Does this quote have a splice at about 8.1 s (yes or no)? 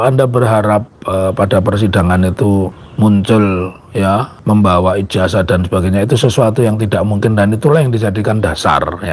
no